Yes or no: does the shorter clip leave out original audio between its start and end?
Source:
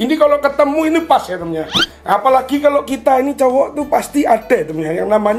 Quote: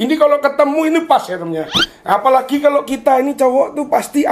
no